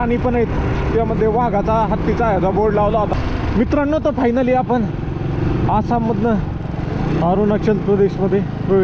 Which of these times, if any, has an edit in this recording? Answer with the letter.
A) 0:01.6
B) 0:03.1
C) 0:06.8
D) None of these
B